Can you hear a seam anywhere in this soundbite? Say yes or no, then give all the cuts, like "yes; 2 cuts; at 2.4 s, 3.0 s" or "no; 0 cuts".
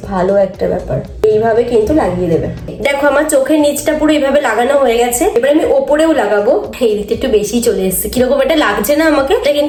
no; 0 cuts